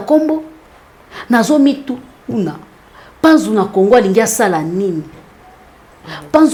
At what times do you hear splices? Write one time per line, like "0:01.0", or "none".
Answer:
none